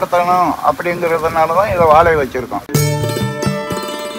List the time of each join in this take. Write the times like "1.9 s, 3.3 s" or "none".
2.7 s